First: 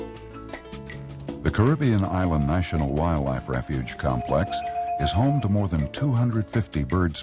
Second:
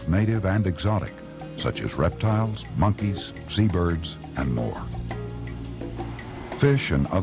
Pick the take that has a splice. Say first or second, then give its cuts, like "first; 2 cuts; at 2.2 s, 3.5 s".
second; 1 cut; at 3.4 s